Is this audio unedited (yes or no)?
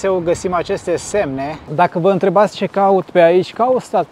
no